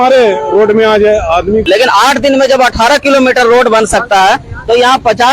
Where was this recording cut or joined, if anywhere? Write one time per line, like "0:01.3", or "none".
0:01.6